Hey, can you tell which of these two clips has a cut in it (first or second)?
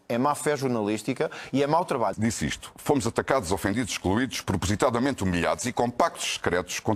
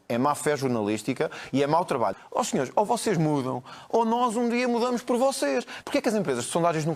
second